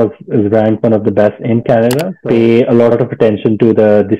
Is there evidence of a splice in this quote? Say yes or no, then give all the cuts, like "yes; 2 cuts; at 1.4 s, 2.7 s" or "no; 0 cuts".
yes; 2 cuts; at 2.1 s, 2.9 s